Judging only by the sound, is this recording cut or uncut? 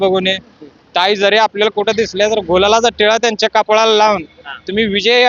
uncut